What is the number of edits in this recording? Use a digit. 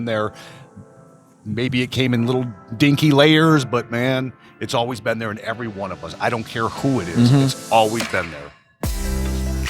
1